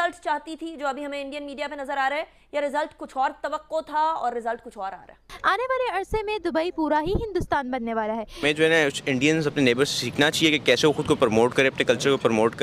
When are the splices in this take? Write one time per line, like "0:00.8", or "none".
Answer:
0:05.3
0:08.4